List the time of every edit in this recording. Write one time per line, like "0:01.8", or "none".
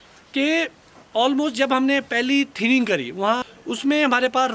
0:03.4